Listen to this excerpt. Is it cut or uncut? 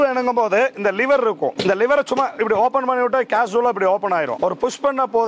uncut